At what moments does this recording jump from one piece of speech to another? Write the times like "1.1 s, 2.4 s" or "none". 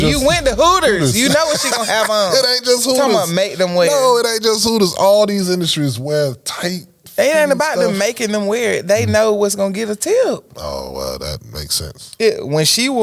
none